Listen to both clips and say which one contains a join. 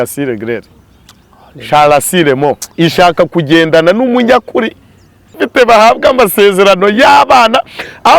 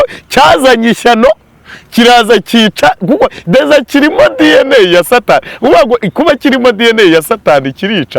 first; 1 cut; at 5.4 s

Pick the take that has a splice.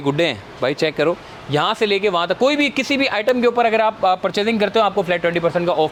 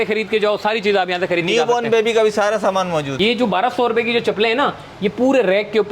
second; 1 cut; at 3.1 s

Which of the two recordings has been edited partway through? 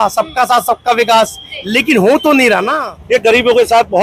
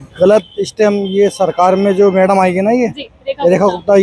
first; 1 cut; at 2.9 s

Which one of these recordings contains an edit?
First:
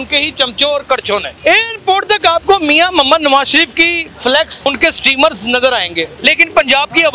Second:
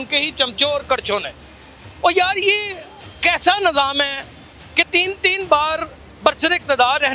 first; 3 cuts; at 1.3 s, 4.7 s, 6.1 s

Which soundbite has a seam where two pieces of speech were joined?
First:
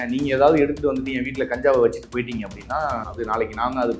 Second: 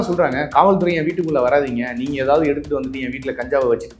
first; 1 cut; at 3.1 s

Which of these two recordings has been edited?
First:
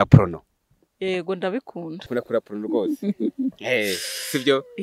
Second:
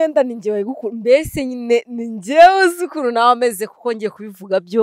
first; 1 cut; at 2.0 s

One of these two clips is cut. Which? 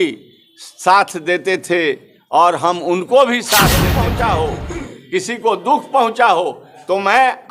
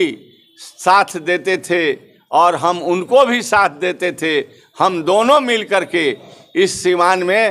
first; 1 cut; at 3.9 s

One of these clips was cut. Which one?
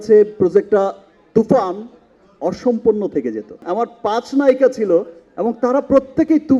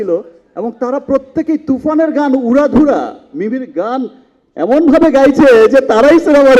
first; 1 cut; at 3.6 s

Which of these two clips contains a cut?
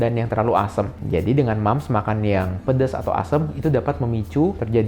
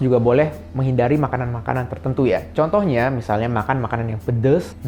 first; 1 cut; at 1.0 s

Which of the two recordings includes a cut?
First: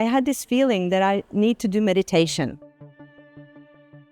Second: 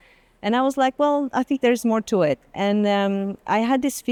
first; 1 cut; at 2.5 s

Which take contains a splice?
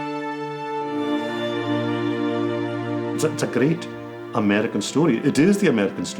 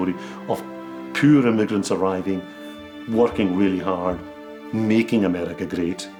first; 1 cut; at 3.2 s

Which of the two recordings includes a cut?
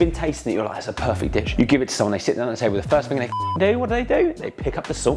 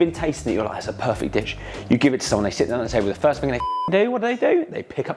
first; 1 cut; at 1.5 s

